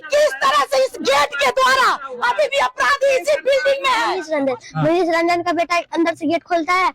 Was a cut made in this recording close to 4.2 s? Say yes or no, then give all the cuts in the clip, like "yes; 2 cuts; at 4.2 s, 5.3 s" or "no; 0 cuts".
yes; 1 cut; at 4.2 s